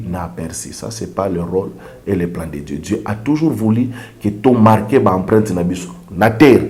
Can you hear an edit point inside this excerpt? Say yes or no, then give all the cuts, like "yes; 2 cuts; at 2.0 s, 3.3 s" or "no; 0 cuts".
no; 0 cuts